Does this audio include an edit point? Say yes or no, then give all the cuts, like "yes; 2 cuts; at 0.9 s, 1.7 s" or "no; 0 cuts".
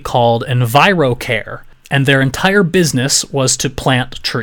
no; 0 cuts